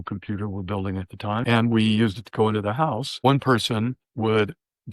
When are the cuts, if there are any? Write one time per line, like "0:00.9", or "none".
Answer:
0:01.4
0:03.1
0:04.0

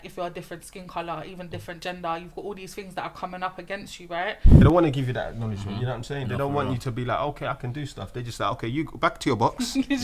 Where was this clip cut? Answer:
0:04.6

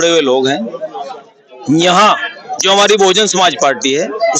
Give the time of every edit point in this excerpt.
none

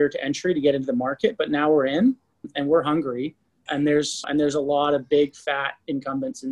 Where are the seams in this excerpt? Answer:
0:02.5

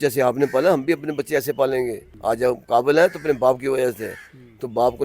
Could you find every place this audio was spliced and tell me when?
0:02.1

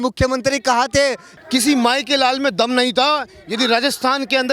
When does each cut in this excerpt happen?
0:01.3

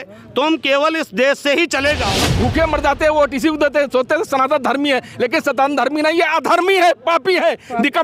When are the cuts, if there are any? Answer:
0:02.2

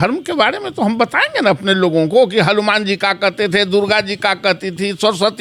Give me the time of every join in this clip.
none

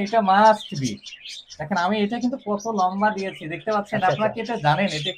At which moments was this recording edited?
none

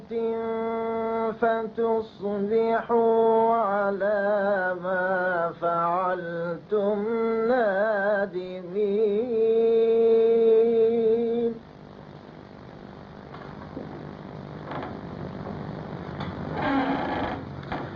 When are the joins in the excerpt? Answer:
0:16.4

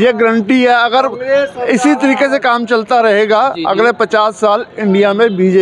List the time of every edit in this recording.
none

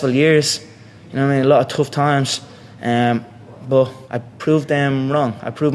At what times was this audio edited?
none

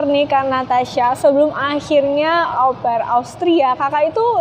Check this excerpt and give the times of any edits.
0:02.5

